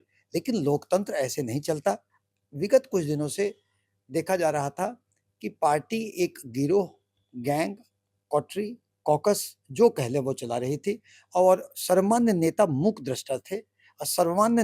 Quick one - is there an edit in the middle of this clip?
no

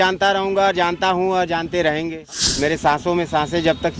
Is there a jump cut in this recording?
yes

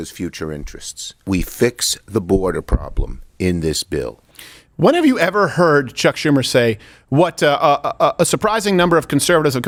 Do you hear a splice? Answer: no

